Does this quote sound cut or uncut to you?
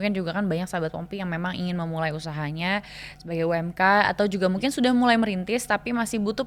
uncut